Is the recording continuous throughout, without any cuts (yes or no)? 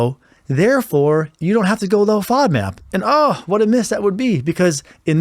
no